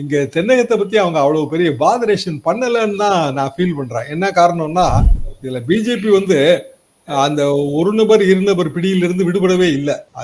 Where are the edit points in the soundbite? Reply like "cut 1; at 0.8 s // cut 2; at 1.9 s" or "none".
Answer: cut 1; at 5.0 s